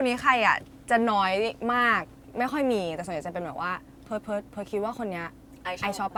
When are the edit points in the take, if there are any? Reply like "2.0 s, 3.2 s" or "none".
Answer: none